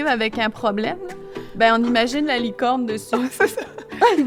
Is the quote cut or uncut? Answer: uncut